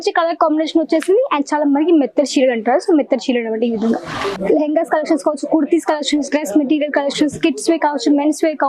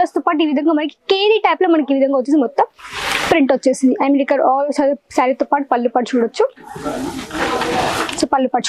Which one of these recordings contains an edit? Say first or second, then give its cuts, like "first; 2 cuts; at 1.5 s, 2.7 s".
first; 1 cut; at 4.4 s